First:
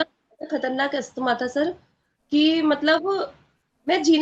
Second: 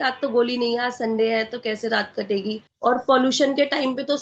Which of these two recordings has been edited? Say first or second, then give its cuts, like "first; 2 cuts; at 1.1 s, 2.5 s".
second; 1 cut; at 2.7 s